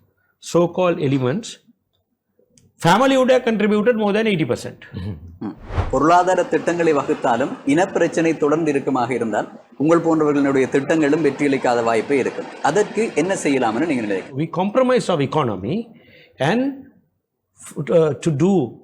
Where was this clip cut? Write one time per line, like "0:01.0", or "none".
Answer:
0:05.7
0:14.4